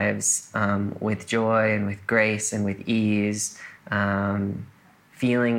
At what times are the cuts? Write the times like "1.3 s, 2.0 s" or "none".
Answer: none